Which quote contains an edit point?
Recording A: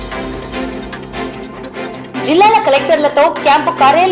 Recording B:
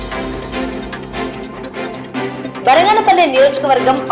A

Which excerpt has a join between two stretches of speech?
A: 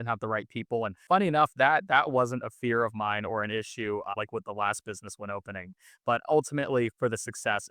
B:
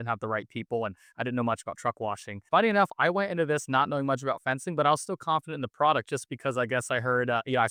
A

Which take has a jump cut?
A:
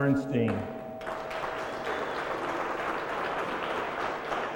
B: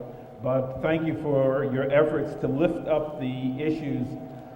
B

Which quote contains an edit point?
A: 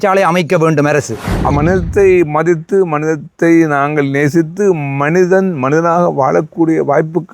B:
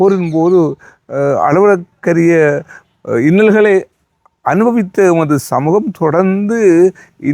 A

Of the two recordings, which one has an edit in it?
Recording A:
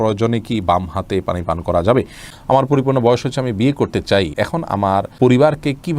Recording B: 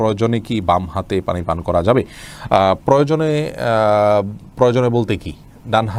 A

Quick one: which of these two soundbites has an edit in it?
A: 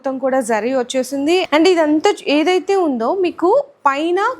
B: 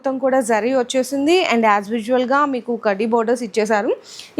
A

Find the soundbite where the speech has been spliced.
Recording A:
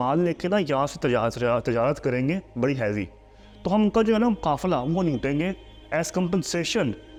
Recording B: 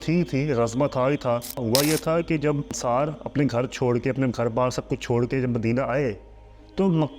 B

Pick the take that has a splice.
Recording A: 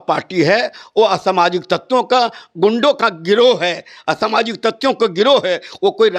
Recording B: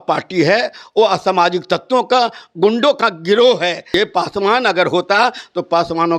B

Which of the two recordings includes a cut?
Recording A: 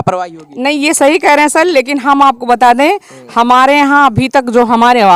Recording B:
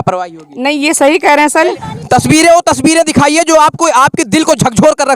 B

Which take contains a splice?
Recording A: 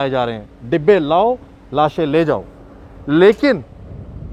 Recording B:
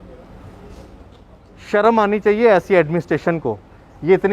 B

